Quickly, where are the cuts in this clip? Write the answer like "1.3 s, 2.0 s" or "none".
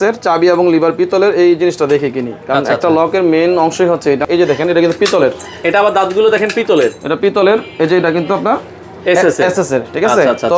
4.2 s